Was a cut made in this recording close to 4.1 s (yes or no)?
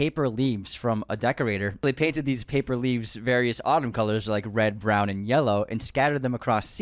no